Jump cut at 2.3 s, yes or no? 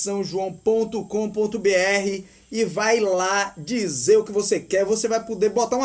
no